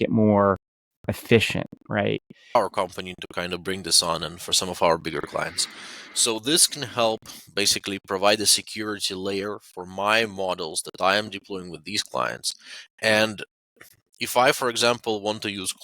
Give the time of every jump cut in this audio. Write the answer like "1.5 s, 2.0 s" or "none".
2.5 s